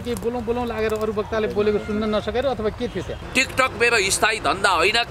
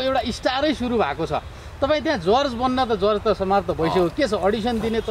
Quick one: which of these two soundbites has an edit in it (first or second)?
first